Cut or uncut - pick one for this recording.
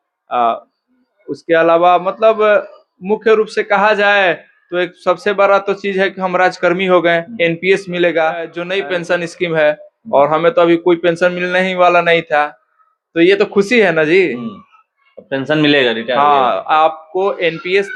uncut